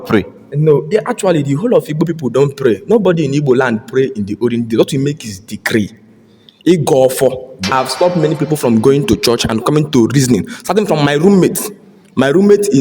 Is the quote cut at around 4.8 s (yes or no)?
no